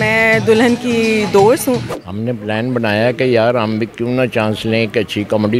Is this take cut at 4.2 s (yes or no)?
no